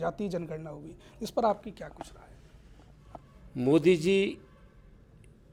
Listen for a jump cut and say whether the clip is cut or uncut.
uncut